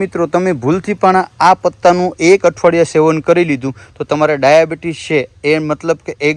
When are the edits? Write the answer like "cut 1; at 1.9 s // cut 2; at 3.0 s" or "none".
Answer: none